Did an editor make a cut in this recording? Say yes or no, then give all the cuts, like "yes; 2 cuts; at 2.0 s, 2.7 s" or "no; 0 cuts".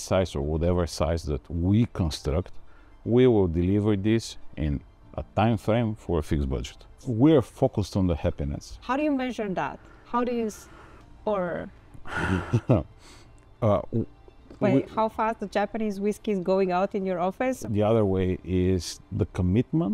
yes; 3 cuts; at 7.0 s, 17.6 s, 18.9 s